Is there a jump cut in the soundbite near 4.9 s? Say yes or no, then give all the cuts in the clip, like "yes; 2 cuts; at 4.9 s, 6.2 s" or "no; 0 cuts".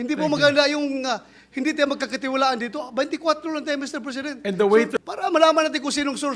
yes; 1 cut; at 4.9 s